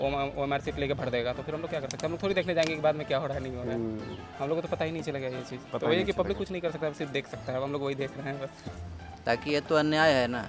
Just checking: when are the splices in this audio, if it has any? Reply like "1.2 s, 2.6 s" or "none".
8.6 s

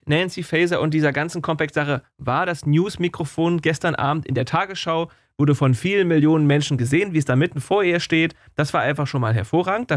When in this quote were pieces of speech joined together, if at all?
none

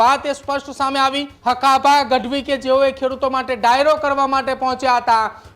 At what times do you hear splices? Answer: 1.3 s

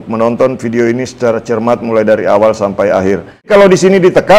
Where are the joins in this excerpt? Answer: 3.5 s

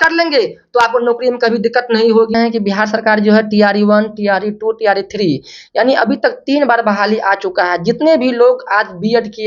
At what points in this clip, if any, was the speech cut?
2.3 s

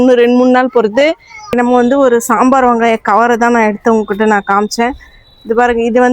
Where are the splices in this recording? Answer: 1.5 s

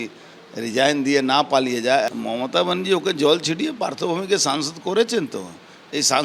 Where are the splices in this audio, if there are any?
2.1 s

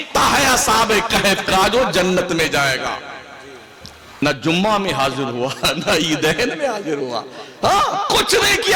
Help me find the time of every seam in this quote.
4.2 s

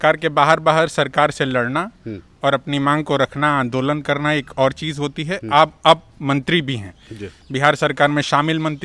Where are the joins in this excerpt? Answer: none

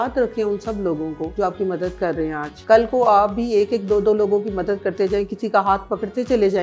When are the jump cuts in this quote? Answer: 1.3 s, 2.5 s

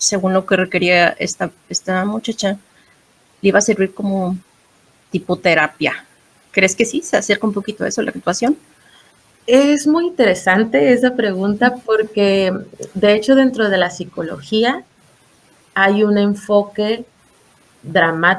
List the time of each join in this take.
none

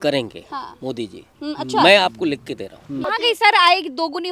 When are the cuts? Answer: 3.0 s

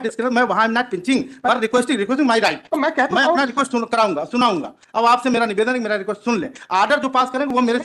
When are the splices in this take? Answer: none

